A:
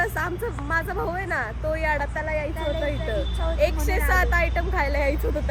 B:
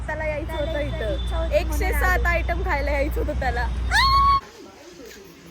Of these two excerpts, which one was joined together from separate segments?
B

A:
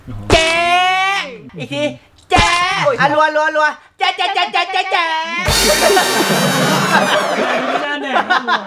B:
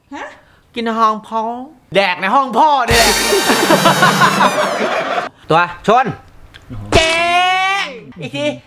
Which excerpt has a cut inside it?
B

